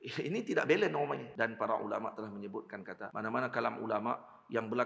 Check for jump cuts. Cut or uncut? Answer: cut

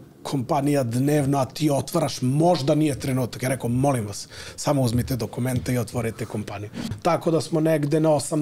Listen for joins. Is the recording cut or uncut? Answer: cut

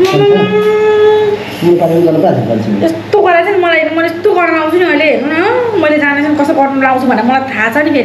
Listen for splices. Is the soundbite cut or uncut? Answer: uncut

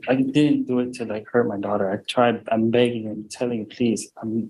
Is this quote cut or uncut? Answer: uncut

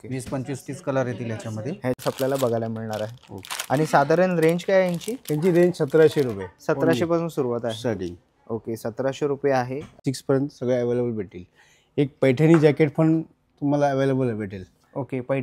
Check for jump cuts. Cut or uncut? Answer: cut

